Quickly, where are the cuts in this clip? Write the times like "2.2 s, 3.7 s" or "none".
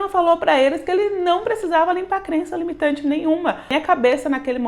3.7 s